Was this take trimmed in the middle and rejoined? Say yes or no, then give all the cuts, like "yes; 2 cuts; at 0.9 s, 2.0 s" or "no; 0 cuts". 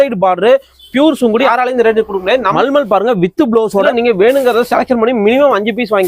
yes; 3 cuts; at 1.5 s, 2.5 s, 3.9 s